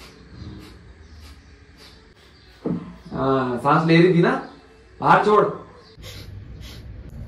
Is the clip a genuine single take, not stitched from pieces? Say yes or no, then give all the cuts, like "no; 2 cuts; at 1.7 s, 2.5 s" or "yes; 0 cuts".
yes; 0 cuts